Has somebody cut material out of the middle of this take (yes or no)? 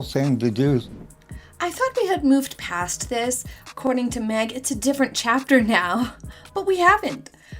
yes